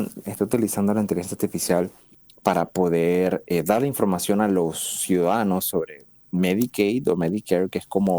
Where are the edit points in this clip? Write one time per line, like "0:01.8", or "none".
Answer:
0:02.5